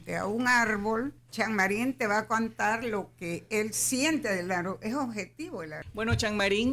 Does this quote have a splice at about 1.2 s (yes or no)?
yes